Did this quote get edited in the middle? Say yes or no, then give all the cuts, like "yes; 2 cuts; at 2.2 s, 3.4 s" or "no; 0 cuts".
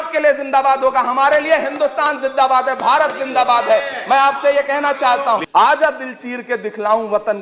yes; 1 cut; at 5.4 s